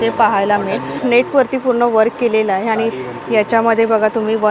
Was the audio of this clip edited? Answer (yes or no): yes